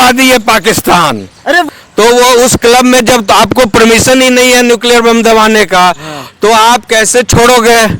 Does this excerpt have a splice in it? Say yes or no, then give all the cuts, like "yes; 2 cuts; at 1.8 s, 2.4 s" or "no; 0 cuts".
yes; 1 cut; at 1.7 s